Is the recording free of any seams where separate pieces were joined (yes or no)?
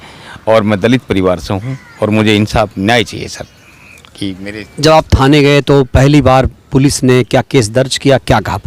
yes